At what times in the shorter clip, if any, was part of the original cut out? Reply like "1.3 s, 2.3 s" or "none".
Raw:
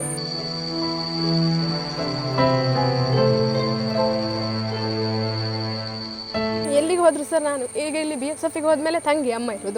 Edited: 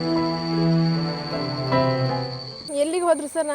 2.3 s

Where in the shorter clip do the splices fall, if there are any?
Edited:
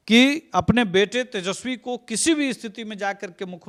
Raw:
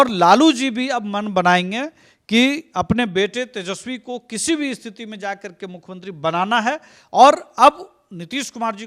none

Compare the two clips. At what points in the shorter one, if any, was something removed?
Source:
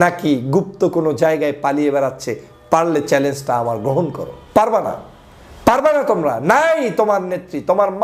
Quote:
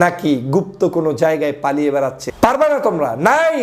2.2 s

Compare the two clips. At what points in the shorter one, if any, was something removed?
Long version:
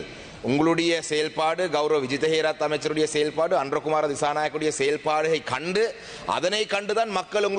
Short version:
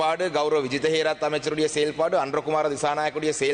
none

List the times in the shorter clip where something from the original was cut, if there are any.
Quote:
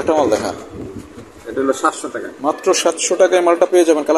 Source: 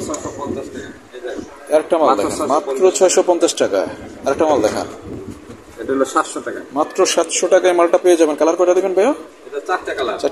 none

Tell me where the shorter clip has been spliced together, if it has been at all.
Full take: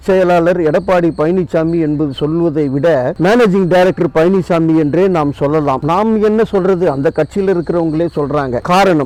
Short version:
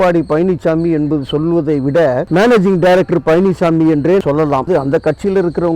4.6 s

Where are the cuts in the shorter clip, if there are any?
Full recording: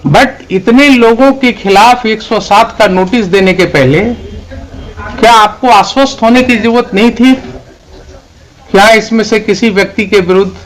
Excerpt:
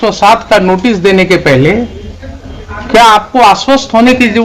none

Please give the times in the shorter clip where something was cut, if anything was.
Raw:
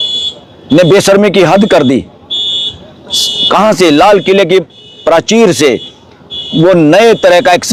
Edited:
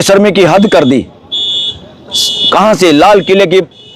none

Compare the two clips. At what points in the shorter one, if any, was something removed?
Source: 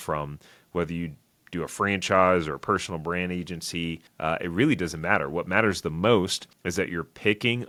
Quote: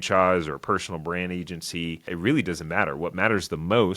2.1 s

